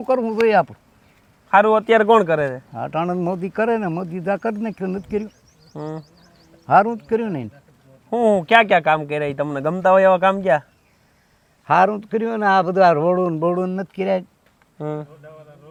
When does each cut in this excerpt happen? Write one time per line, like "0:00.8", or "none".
none